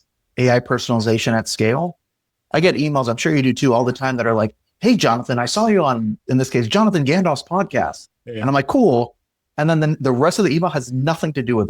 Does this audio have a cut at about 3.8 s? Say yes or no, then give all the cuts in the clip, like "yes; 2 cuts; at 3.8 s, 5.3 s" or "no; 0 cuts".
no; 1 cut; at 2.3 s